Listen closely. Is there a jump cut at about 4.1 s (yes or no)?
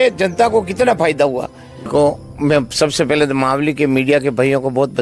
no